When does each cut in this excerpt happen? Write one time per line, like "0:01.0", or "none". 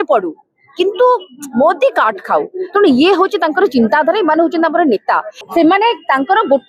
0:05.3